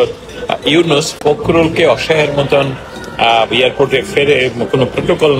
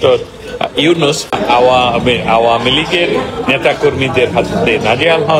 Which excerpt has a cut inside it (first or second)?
second